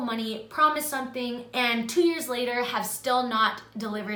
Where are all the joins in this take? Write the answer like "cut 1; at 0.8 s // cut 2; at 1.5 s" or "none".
none